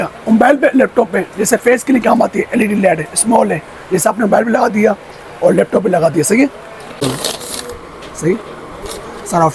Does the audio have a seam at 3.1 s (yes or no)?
no